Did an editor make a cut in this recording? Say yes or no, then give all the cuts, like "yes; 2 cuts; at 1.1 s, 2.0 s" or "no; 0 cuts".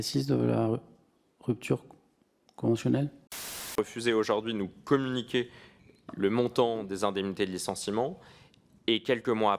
yes; 1 cut; at 3.8 s